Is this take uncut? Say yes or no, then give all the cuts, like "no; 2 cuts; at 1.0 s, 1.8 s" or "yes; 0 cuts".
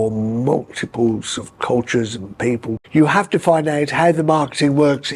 no; 1 cut; at 2.8 s